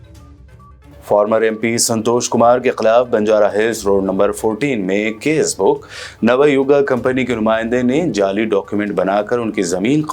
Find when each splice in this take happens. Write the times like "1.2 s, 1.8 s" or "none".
0.9 s